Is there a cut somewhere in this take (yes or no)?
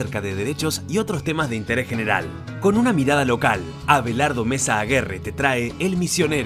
no